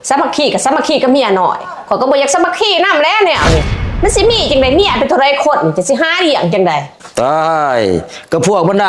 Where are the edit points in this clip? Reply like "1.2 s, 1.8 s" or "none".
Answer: 3.8 s